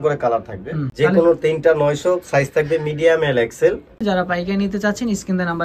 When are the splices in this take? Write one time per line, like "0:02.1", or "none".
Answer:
0:00.9
0:04.0